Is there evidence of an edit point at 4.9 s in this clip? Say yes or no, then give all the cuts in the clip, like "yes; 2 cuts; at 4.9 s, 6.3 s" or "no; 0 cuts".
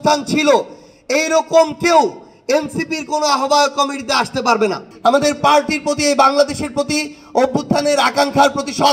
yes; 1 cut; at 4.9 s